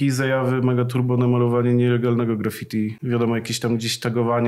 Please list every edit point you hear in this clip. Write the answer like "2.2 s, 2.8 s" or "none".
none